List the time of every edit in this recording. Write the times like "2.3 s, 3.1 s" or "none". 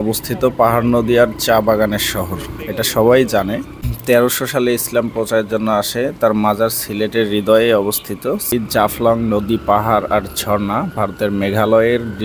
3.8 s, 8.5 s